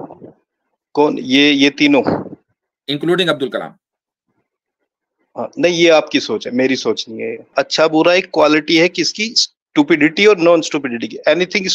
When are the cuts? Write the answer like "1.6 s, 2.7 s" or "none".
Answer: 7.5 s